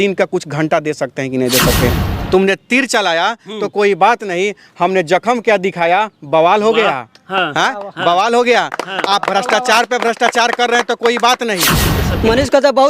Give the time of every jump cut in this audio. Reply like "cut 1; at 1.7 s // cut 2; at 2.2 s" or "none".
cut 1; at 2.0 s // cut 2; at 11.9 s